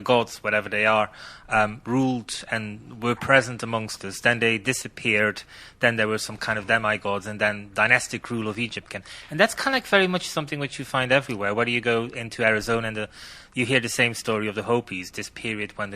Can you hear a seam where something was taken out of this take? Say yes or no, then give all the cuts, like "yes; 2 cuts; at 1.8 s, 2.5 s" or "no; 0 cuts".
yes; 1 cut; at 11.7 s